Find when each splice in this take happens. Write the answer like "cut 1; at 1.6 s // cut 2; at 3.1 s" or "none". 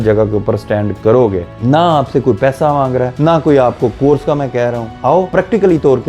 cut 1; at 1.5 s // cut 2; at 3.1 s // cut 3; at 5.0 s